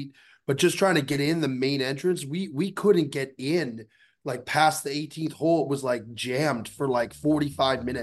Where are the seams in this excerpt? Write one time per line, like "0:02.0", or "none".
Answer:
0:01.1

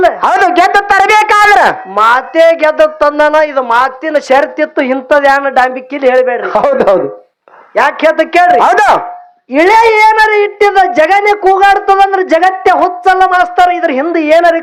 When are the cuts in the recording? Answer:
none

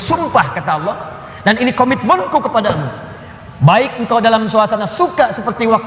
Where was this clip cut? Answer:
none

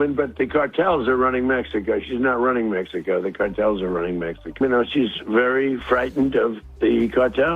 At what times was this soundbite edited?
0:04.6

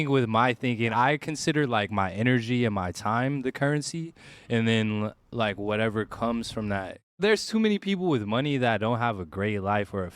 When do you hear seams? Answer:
0:00.9
0:07.2

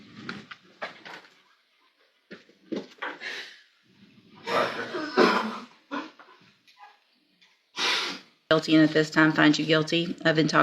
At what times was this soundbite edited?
0:08.5

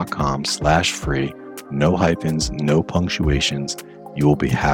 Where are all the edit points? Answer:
none

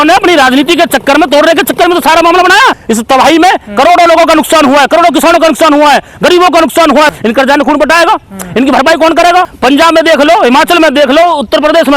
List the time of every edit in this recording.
0:02.8
0:07.1
0:09.5

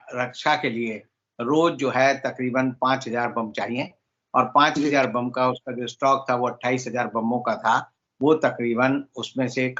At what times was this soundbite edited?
none

